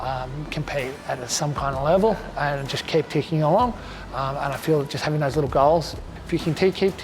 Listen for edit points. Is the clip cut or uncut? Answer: cut